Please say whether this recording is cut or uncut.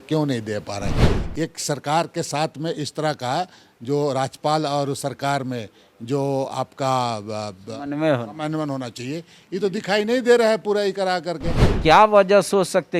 cut